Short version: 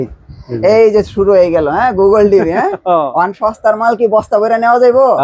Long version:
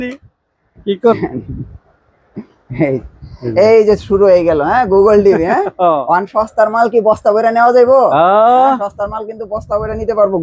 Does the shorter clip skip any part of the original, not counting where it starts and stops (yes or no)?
no